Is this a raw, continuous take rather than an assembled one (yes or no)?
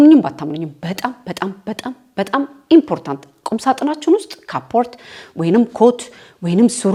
yes